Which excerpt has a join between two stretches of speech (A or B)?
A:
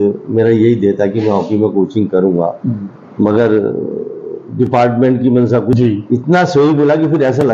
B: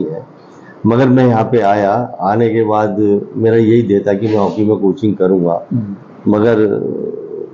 A